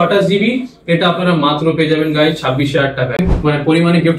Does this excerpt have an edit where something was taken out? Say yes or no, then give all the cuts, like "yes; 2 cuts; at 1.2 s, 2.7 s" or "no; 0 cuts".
yes; 1 cut; at 3.2 s